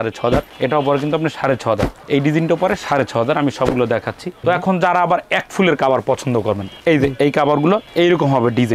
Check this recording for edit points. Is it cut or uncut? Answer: uncut